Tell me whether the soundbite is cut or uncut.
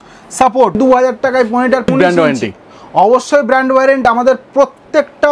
cut